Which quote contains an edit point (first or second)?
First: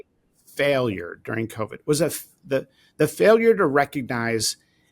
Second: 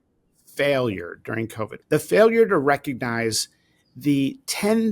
second